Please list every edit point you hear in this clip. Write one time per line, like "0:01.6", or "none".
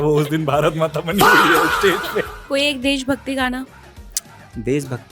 0:02.4